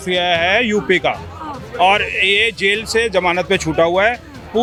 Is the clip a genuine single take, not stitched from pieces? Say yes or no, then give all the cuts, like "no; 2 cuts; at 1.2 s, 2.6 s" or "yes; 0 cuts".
yes; 0 cuts